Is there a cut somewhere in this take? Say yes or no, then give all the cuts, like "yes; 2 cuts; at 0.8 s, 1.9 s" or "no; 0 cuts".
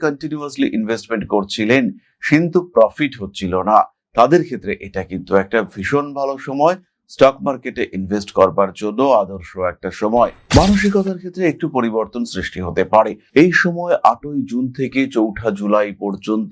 yes; 1 cut; at 10.4 s